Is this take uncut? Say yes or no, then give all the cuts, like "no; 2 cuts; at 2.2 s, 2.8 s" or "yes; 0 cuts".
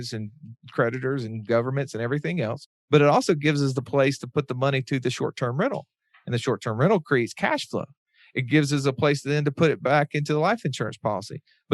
no; 1 cut; at 2.7 s